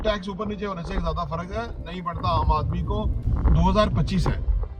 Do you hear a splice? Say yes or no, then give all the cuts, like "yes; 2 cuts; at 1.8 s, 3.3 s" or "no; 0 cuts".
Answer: yes; 1 cut; at 3.2 s